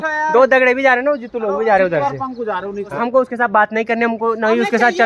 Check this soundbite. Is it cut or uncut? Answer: cut